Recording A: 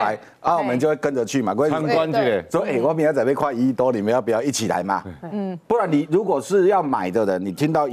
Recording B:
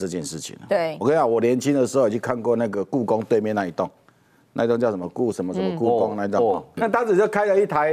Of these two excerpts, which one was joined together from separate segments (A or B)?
B